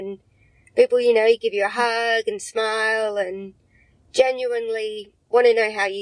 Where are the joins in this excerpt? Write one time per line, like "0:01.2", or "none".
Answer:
none

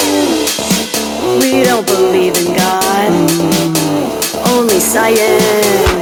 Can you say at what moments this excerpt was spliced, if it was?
none

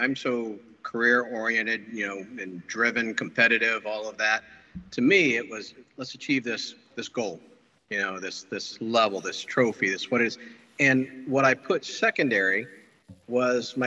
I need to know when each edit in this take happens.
none

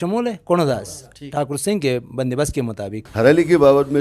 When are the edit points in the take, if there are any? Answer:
0:03.0

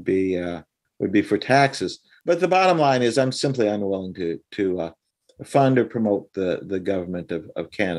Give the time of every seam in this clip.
0:02.1

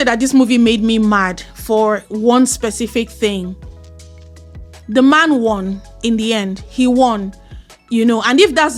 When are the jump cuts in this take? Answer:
none

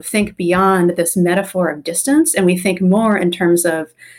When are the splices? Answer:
none

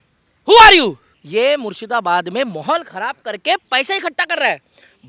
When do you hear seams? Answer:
0:01.1

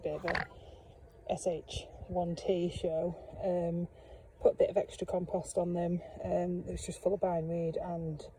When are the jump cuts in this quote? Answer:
none

